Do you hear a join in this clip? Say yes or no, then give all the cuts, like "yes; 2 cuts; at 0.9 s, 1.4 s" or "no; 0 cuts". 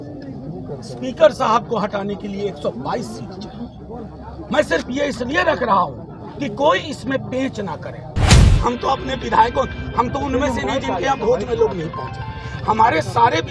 yes; 1 cut; at 8.2 s